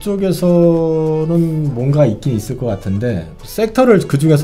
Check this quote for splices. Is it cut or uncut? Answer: uncut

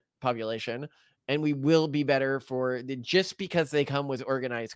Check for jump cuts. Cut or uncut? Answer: uncut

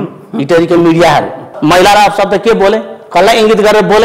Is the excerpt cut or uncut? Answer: cut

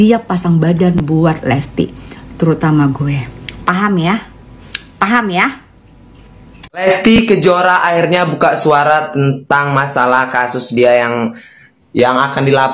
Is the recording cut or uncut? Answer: uncut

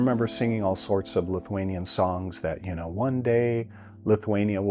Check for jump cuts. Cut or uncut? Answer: uncut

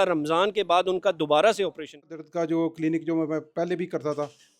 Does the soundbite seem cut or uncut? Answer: cut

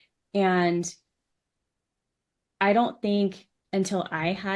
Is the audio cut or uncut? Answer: uncut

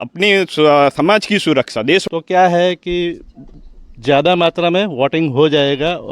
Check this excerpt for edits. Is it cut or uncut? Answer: cut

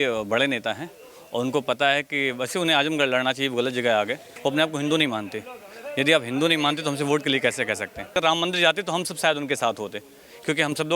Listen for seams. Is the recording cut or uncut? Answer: cut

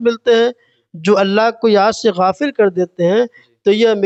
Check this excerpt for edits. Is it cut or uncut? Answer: uncut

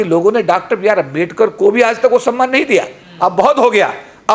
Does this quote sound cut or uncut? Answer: cut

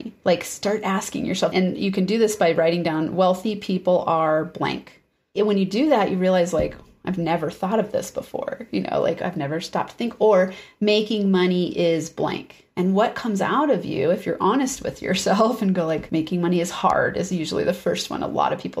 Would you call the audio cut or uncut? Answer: cut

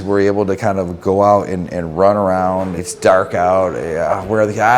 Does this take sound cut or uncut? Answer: cut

